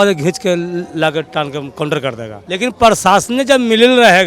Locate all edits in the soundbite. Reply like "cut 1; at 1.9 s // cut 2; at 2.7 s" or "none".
cut 1; at 2.4 s